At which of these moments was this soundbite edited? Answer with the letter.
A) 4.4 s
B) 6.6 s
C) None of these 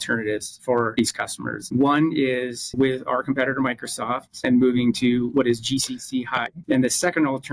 B